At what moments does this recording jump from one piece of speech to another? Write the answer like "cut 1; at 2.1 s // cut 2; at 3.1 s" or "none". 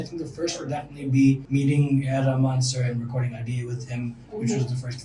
cut 1; at 1.4 s

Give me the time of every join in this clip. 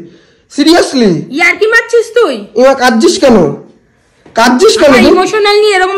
none

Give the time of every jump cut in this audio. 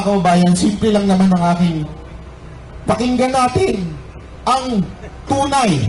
none

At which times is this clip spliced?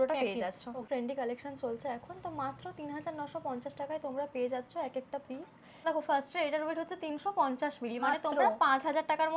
cut 1; at 0.9 s // cut 2; at 5.8 s

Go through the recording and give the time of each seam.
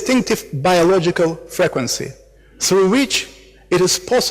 cut 1; at 1.0 s

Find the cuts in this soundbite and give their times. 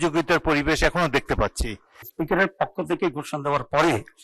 cut 1; at 2.1 s

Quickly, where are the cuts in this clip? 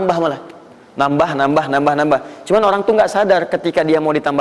none

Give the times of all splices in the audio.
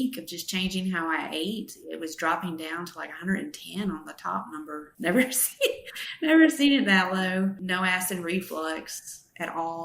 none

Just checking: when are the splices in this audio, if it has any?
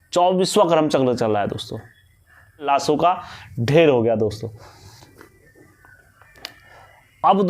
cut 1; at 2.7 s

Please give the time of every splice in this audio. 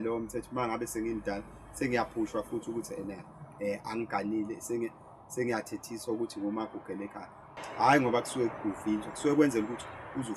cut 1; at 7.5 s

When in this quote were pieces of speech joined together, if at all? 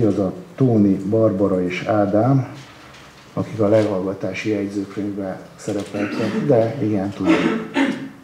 none

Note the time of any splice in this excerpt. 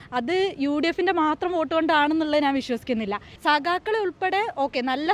cut 1; at 3.3 s

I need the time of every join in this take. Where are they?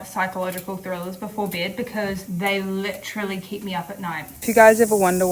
cut 1; at 2.2 s // cut 2; at 4.3 s

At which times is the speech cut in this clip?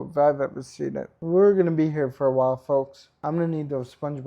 cut 1; at 1.1 s // cut 2; at 3.2 s

